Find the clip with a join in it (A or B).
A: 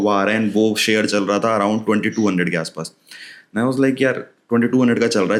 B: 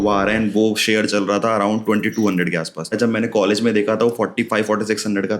B